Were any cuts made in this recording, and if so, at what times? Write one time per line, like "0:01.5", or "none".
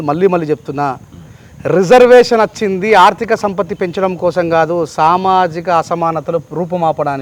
none